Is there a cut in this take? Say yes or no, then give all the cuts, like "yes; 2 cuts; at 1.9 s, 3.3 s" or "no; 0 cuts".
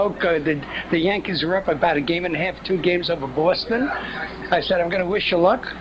yes; 1 cut; at 4.5 s